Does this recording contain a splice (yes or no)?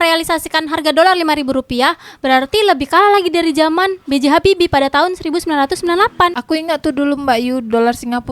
yes